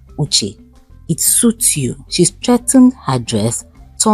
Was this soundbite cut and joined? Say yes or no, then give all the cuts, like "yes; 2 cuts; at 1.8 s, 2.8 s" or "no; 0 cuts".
yes; 1 cut; at 2.0 s